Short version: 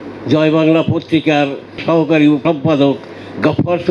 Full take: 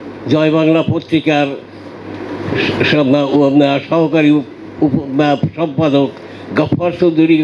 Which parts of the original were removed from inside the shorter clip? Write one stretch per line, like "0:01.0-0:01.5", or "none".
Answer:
0:01.8-0:03.8
0:04.4-0:05.5